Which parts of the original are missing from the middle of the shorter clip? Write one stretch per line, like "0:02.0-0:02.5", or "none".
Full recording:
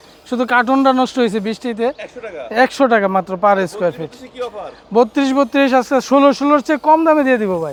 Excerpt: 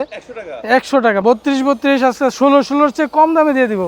0:03.1-0:04.9